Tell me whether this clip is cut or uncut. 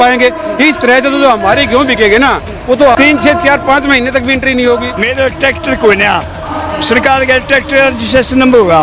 cut